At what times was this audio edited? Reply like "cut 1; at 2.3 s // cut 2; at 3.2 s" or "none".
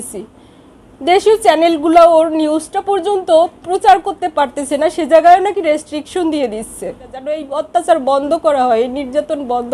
cut 1; at 7.4 s